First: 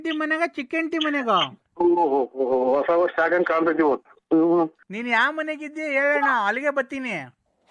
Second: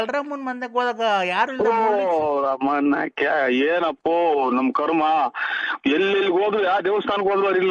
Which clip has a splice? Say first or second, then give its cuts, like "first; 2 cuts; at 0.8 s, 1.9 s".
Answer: first; 2 cuts; at 1.6 s, 4.9 s